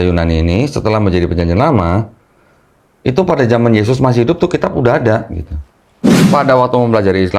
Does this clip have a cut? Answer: yes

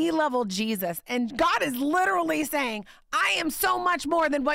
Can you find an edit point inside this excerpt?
yes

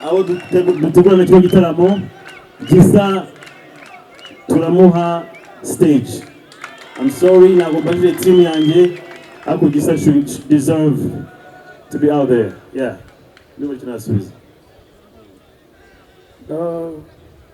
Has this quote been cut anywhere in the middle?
no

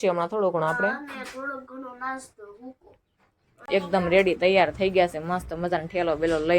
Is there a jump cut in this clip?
yes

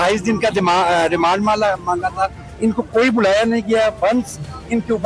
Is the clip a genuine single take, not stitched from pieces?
no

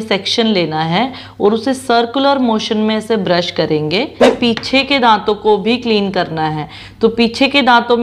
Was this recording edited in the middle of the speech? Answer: yes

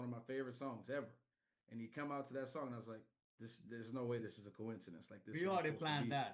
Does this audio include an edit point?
no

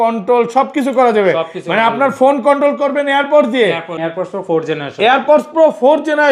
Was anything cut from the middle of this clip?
yes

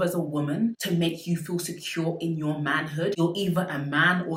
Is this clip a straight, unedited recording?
yes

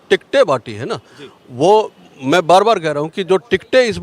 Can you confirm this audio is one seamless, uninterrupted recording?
yes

